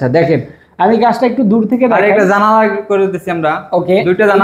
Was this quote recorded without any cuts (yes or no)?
yes